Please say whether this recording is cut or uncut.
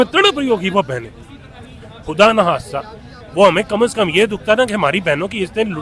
uncut